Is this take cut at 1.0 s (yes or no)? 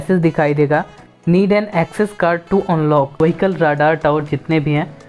no